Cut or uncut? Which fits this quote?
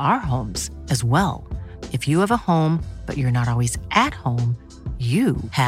uncut